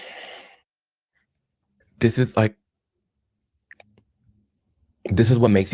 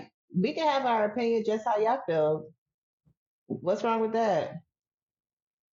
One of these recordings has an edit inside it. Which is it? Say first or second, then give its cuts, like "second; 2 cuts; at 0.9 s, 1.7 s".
first; 1 cut; at 1.7 s